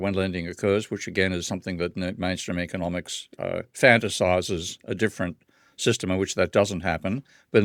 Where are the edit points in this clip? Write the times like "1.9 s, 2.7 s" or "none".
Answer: none